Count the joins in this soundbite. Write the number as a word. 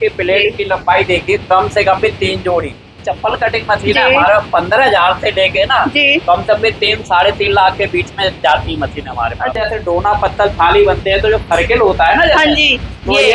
two